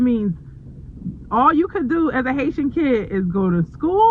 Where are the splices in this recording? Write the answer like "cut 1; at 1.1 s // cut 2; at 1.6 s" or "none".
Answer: none